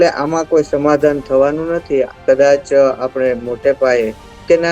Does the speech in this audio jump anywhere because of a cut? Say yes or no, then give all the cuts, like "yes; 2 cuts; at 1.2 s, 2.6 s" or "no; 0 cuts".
yes; 1 cut; at 2.1 s